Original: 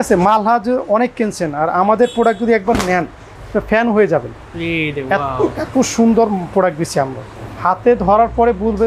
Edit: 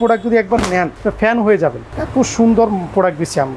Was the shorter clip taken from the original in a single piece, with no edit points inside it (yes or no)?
no